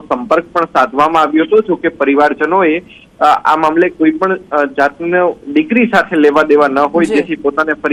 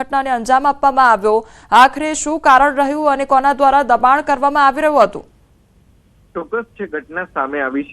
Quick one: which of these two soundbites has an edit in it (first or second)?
second